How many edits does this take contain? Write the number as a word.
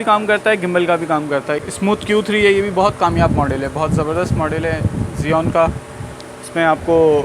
one